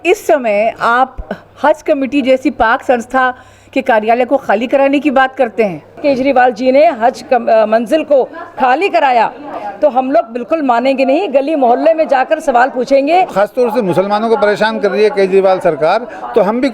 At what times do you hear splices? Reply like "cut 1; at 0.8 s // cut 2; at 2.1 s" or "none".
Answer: cut 1; at 6.0 s // cut 2; at 13.3 s